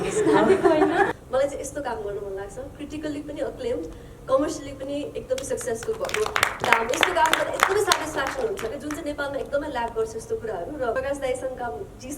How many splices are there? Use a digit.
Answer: 2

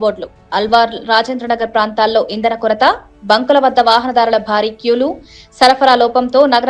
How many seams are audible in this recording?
0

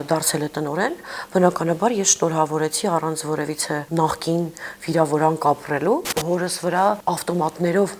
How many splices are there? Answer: 3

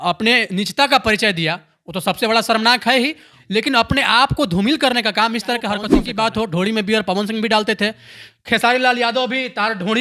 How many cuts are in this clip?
2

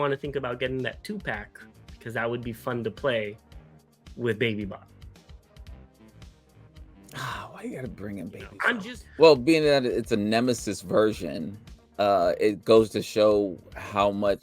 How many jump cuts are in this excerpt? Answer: 1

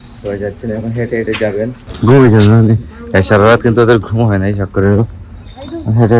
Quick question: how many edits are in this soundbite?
1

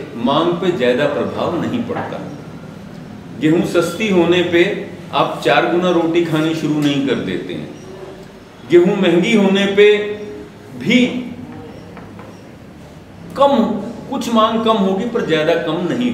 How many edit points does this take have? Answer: 0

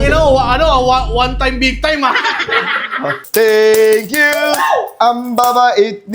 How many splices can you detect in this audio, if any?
1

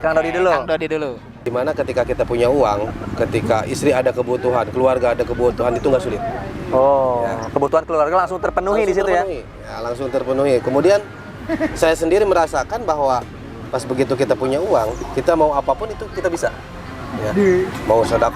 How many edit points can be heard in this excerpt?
1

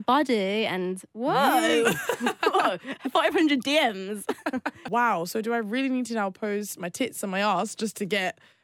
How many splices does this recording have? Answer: 1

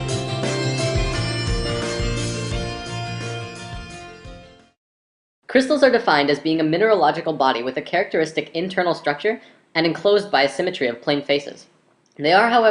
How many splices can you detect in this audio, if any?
1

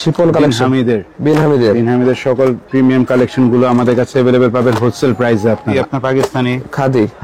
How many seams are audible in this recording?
1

